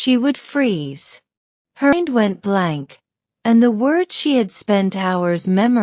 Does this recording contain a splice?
yes; 1 cut; at 1.9 s

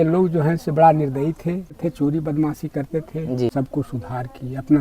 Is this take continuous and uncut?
no; 2 cuts; at 1.8 s, 3.5 s

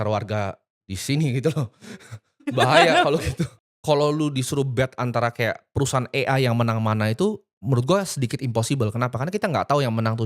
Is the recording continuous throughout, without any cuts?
no; 1 cut; at 3.6 s

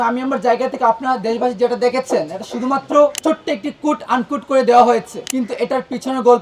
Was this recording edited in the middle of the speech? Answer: yes; 2 cuts; at 3.2 s, 5.2 s

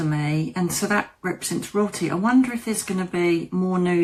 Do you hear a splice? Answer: no; 0 cuts

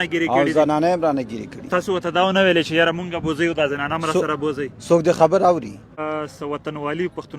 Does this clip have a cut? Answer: yes; 1 cut; at 6.0 s

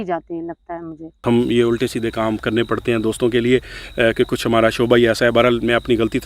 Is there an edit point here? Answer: yes; 1 cut; at 1.2 s

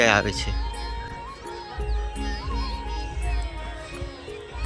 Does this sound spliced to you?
no; 0 cuts

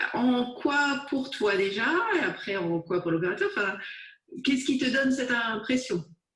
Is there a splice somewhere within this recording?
yes; 1 cut; at 1.2 s

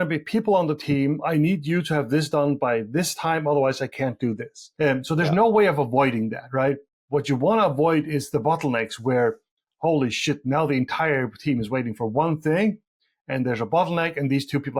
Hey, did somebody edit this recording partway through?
no; 0 cuts

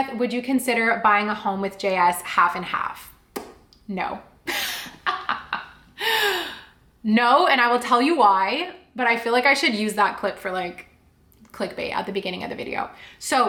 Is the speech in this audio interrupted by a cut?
no; 0 cuts

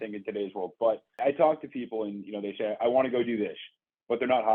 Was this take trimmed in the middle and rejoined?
yes; 1 cut; at 1.2 s

